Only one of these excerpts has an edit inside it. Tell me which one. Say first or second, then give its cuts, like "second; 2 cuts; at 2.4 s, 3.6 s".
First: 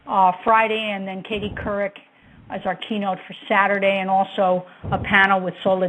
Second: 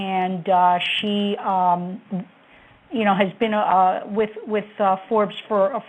second; 1 cut; at 1.9 s